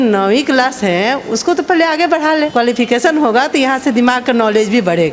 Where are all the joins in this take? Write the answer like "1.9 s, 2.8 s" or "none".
none